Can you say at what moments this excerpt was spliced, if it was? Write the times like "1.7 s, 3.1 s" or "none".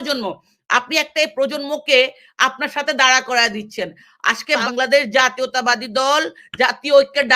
4.6 s